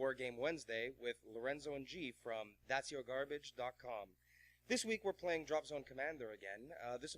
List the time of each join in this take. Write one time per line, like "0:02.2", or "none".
0:05.6

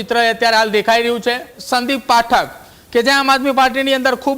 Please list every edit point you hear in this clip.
0:01.6

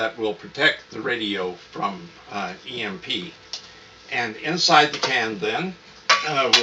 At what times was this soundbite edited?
none

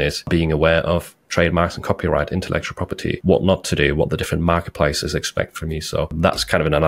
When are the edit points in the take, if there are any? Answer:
none

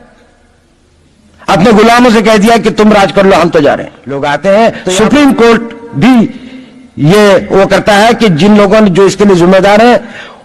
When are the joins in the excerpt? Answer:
0:04.1

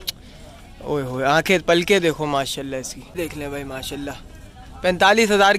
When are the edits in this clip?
0:03.1

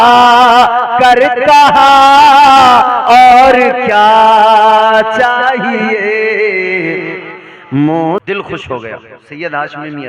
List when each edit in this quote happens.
0:08.2

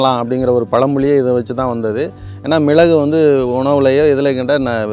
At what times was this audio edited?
none

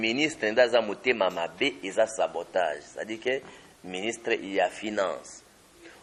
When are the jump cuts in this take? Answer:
none

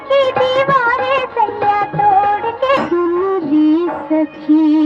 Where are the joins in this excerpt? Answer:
0:02.8

